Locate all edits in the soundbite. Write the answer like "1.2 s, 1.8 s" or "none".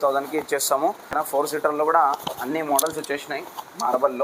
1.3 s